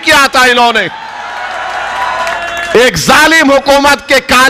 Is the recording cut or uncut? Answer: uncut